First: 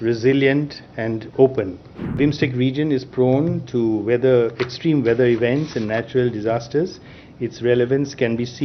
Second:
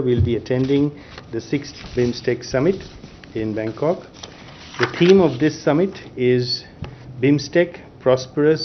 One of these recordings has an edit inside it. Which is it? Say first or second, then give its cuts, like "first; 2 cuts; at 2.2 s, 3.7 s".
first; 1 cut; at 2.2 s